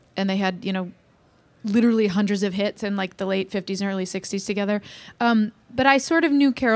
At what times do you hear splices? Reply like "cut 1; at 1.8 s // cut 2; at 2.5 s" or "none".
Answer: cut 1; at 5.0 s